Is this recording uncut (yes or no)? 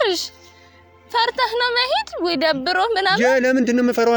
yes